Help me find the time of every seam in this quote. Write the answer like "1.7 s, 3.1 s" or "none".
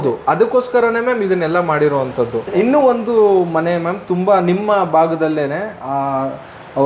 2.4 s